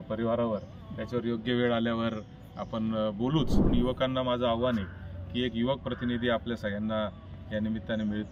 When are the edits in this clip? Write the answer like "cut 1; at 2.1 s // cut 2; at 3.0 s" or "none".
cut 1; at 3.6 s

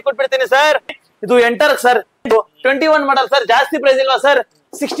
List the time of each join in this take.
cut 1; at 1.0 s // cut 2; at 2.3 s

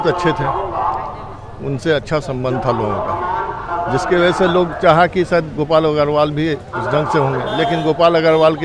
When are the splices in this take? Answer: none

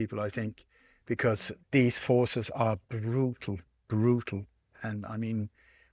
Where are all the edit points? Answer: none

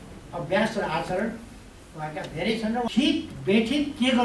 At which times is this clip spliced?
cut 1; at 2.9 s

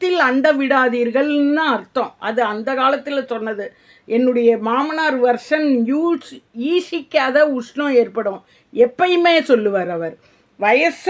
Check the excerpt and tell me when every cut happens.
none

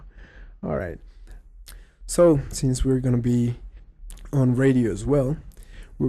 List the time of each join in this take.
cut 1; at 3.3 s

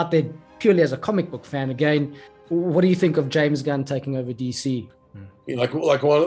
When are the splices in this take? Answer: cut 1; at 4.9 s

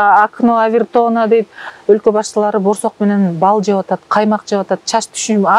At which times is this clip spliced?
cut 1; at 1.7 s

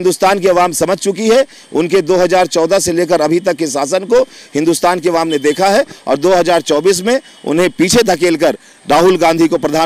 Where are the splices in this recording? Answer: none

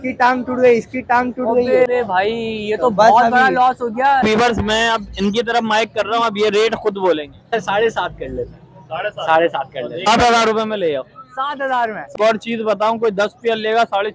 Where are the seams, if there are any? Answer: cut 1; at 1.9 s // cut 2; at 4.2 s // cut 3; at 7.5 s // cut 4; at 10.1 s // cut 5; at 12.0 s

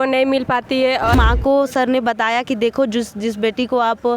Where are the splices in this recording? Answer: cut 1; at 1.1 s

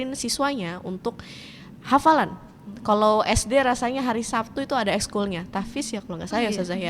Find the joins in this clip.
none

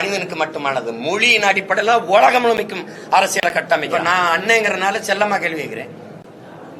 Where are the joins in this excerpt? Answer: cut 1; at 3.9 s

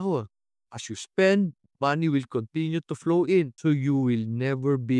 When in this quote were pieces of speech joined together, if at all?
cut 1; at 3.5 s

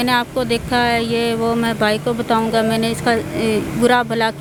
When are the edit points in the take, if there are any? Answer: none

